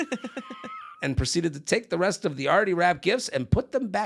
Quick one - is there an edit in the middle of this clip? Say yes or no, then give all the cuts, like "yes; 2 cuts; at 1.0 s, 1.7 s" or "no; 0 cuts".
yes; 1 cut; at 1.0 s